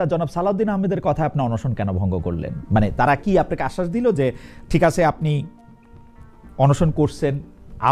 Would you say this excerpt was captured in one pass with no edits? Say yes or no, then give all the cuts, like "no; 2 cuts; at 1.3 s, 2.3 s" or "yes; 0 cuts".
yes; 0 cuts